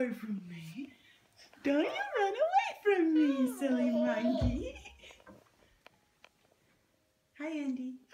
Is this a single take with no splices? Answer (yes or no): no